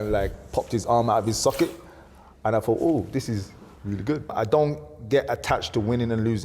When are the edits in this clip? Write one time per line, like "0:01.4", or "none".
0:04.3